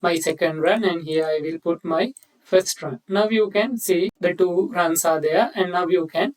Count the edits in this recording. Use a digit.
1